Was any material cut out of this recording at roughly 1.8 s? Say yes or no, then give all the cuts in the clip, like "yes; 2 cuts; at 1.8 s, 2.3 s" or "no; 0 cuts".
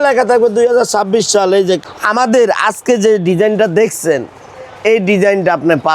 yes; 1 cut; at 1.8 s